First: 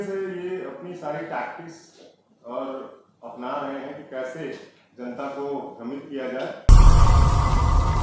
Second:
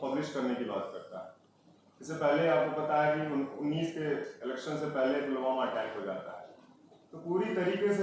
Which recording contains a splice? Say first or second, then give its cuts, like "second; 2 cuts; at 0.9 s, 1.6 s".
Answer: first; 1 cut; at 6.6 s